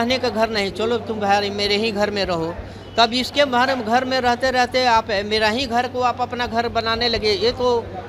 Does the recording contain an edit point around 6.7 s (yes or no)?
no